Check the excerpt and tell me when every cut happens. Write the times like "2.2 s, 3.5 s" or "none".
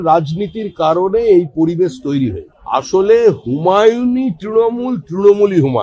2.5 s